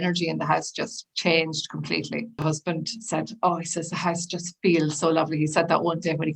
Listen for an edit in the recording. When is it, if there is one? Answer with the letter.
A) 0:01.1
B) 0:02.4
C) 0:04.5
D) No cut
B